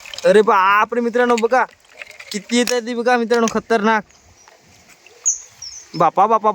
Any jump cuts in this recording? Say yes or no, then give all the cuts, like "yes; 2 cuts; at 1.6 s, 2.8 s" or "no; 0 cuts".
no; 0 cuts